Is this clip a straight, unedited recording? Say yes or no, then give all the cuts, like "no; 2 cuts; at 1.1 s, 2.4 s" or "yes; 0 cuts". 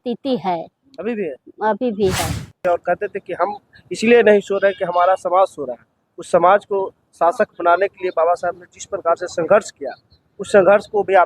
no; 1 cut; at 2.5 s